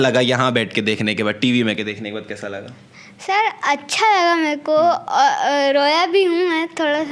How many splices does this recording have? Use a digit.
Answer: 0